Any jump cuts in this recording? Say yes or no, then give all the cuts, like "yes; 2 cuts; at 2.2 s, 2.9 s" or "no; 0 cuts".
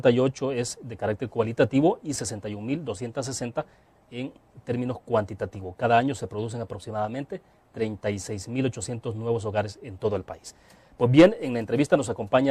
no; 0 cuts